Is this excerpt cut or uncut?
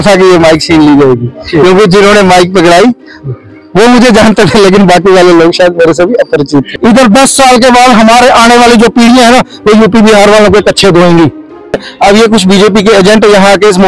cut